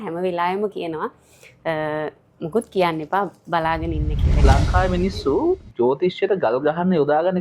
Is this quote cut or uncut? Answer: cut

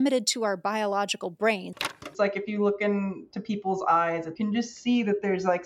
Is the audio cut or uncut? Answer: cut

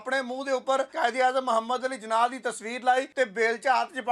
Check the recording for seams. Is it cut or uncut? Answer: cut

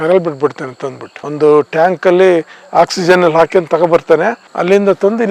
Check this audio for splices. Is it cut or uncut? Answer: uncut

